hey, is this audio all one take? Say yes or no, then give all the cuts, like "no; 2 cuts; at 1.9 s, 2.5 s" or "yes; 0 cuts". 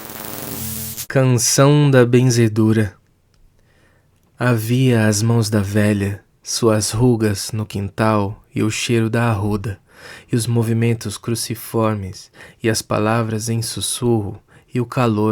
no; 1 cut; at 1.0 s